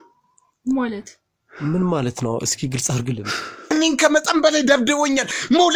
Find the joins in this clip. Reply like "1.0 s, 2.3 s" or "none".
3.5 s